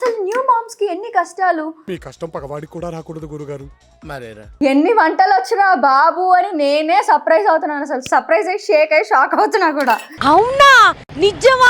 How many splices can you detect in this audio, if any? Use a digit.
1